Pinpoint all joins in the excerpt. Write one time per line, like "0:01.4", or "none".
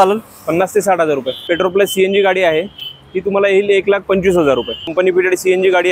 0:01.4
0:04.9